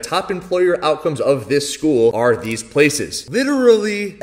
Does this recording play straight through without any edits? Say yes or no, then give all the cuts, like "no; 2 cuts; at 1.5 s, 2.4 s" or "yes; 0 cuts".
yes; 0 cuts